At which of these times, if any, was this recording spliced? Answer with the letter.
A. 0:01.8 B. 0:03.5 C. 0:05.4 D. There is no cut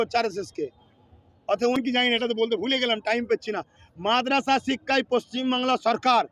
A